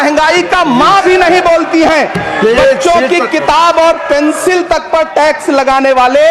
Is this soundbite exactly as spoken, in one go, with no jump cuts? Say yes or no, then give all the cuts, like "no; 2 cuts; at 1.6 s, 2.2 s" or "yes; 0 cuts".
yes; 0 cuts